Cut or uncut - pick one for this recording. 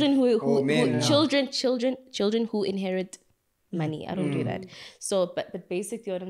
uncut